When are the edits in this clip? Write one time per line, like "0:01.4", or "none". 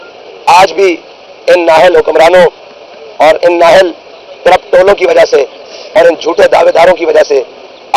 none